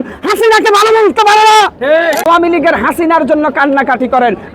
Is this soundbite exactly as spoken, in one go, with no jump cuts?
no; 1 cut; at 2.2 s

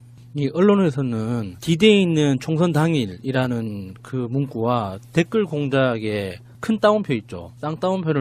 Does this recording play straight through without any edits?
no; 1 cut; at 6.0 s

